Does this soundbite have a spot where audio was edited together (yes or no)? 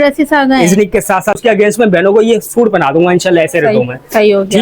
yes